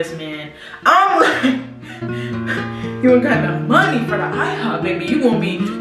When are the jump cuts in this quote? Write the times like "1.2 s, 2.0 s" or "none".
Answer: none